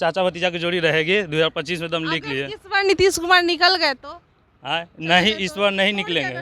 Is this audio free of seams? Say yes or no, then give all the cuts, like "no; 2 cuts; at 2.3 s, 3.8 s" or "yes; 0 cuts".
yes; 0 cuts